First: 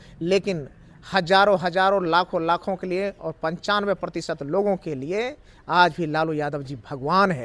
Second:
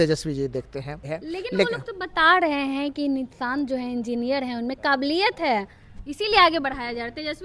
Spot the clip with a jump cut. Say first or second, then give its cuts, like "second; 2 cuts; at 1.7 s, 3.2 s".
second; 1 cut; at 1.1 s